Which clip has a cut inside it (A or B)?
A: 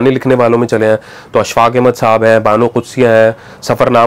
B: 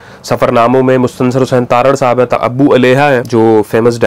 B